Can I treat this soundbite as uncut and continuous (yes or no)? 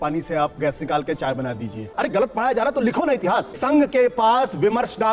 no